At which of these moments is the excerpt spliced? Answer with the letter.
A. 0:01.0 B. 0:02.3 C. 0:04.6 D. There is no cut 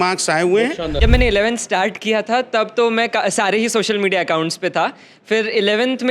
A